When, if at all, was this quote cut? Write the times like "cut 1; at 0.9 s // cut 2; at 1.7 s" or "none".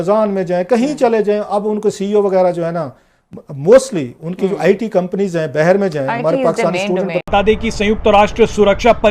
cut 1; at 7.2 s

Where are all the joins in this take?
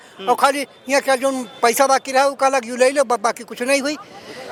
none

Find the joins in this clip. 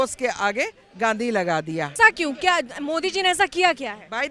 cut 1; at 1.9 s

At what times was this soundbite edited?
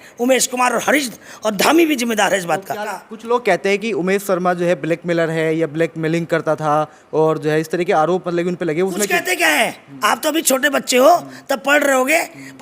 cut 1; at 2.9 s

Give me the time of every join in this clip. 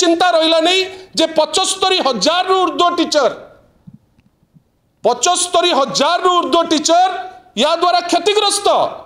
none

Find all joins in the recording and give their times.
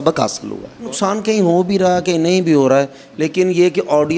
cut 1; at 0.9 s

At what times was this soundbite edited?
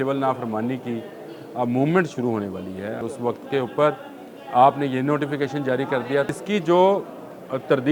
cut 1; at 3.0 s // cut 2; at 6.3 s

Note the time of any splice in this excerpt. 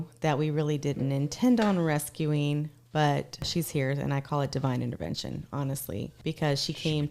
cut 1; at 3.5 s // cut 2; at 6.1 s

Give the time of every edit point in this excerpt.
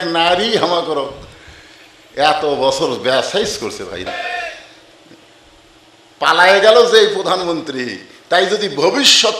cut 1; at 4.1 s

